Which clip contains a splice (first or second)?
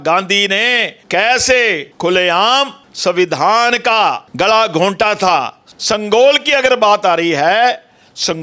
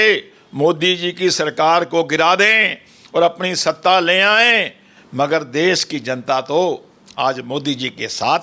first